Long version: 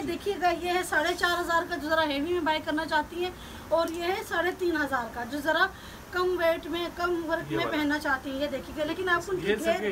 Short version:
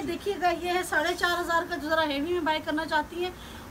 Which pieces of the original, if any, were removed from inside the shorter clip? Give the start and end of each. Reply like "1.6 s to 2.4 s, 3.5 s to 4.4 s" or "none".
none